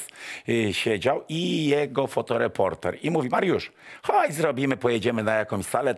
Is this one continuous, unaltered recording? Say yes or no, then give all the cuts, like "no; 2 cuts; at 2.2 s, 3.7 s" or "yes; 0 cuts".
yes; 0 cuts